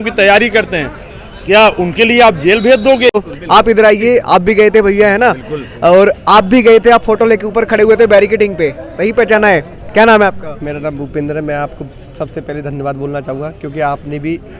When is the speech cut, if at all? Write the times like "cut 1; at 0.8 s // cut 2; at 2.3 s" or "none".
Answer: cut 1; at 3.2 s

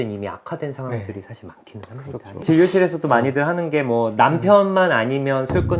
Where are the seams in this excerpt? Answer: cut 1; at 2.3 s

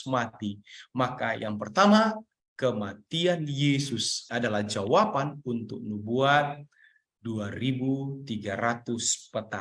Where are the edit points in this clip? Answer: cut 1; at 4.2 s

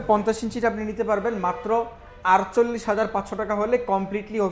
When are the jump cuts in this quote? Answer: none

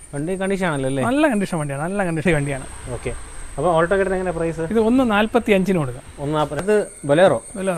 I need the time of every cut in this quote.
cut 1; at 2.2 s // cut 2; at 6.6 s

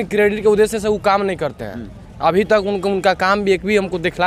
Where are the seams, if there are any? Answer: none

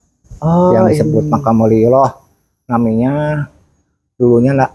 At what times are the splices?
none

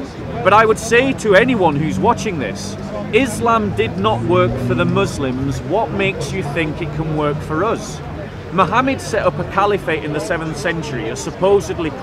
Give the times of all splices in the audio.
none

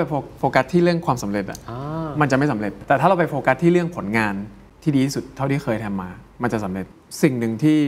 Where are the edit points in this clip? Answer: cut 1; at 2.8 s // cut 2; at 4.7 s // cut 3; at 6.8 s

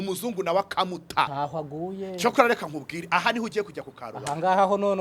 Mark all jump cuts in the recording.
cut 1; at 1.3 s

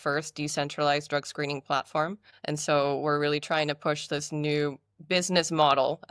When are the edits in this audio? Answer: cut 1; at 2.3 s

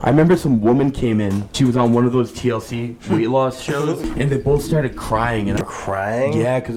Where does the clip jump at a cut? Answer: cut 1; at 1.5 s // cut 2; at 4.0 s // cut 3; at 5.6 s

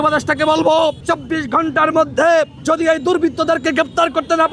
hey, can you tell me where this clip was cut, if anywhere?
cut 1; at 1.0 s // cut 2; at 2.6 s

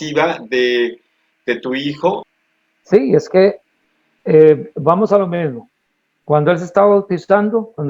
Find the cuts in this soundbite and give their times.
cut 1; at 2.3 s

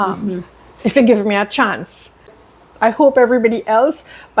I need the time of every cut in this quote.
cut 1; at 2.4 s

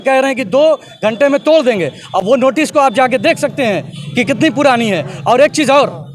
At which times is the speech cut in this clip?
none

